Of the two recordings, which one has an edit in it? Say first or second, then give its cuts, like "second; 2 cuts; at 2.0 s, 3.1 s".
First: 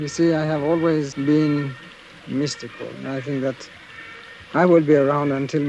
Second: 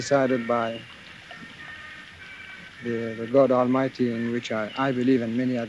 first; 1 cut; at 1.1 s